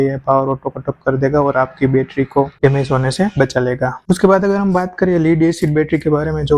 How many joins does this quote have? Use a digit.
0